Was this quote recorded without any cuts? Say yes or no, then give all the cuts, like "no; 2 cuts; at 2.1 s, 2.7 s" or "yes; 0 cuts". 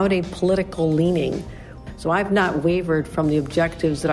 no; 1 cut; at 1.8 s